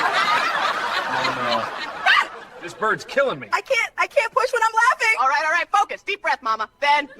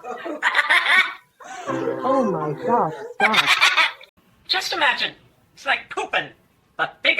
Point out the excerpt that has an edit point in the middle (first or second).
second